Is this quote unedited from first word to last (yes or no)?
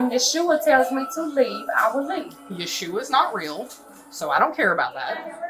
yes